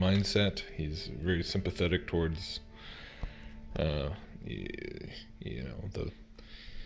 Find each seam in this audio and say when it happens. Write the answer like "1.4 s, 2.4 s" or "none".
1.6 s